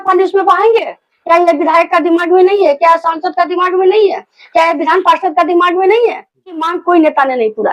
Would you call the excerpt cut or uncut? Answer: cut